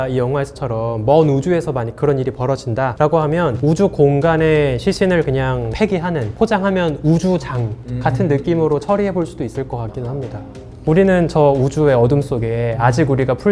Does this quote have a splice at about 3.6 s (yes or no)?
yes